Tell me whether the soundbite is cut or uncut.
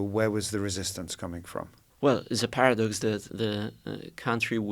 cut